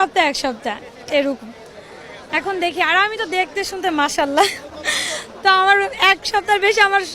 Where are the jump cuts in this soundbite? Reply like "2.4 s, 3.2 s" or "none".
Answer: none